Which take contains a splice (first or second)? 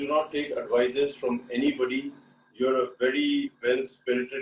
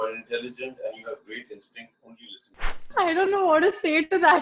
second